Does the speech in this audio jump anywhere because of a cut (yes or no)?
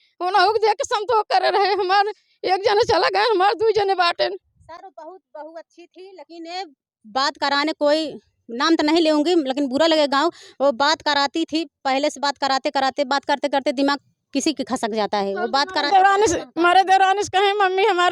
no